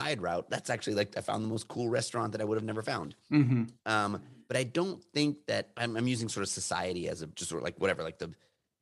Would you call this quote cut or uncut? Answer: cut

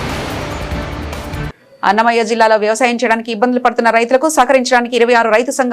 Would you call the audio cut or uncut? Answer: cut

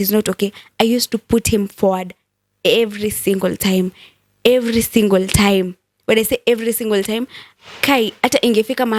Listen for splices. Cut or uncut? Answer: uncut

